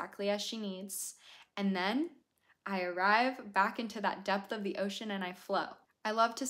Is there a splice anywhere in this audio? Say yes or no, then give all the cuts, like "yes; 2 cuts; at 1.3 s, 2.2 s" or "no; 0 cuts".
no; 0 cuts